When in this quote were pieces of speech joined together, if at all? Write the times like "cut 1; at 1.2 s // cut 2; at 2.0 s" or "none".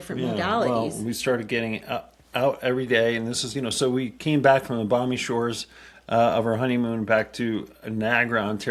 none